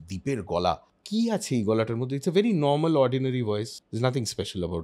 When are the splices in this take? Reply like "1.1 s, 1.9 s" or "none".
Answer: 0.9 s, 3.8 s